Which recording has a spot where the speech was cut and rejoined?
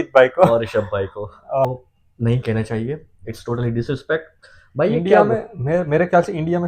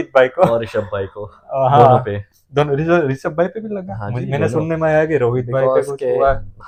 first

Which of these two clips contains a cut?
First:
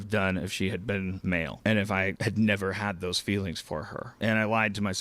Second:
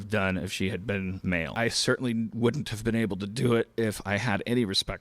second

